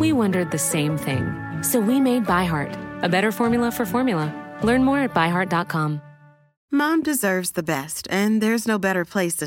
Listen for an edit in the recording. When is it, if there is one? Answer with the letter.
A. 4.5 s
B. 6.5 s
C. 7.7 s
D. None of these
B